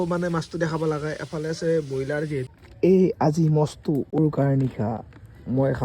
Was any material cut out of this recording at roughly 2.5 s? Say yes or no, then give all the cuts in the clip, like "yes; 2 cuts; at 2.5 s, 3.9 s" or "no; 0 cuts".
yes; 1 cut; at 2.5 s